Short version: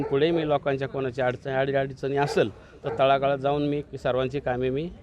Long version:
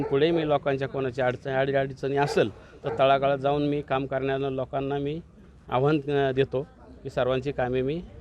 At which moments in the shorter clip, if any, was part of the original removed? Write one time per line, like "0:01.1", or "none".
0:03.8